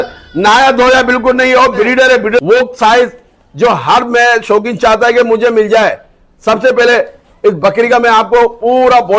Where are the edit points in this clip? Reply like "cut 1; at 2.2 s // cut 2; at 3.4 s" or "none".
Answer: cut 1; at 2.4 s